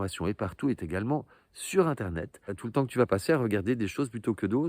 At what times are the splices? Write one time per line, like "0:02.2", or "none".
0:02.5